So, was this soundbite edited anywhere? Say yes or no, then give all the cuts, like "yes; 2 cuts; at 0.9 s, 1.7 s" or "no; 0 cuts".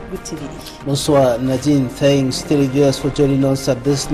no; 0 cuts